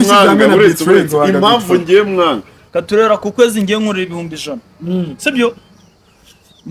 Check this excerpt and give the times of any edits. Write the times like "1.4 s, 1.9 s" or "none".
2.5 s

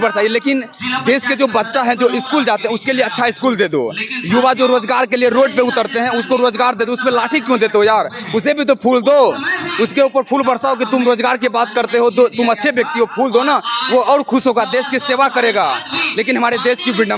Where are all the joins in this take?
none

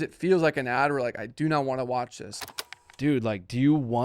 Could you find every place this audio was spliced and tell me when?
2.4 s

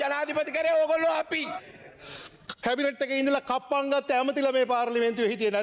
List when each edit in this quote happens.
1.6 s

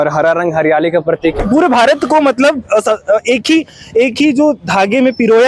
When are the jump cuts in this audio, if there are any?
1.4 s

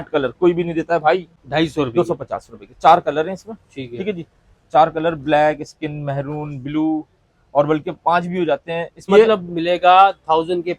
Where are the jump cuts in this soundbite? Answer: 1.4 s, 9.1 s

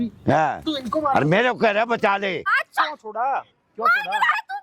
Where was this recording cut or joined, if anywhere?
2.5 s

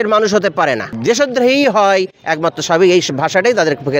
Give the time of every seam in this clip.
0.9 s

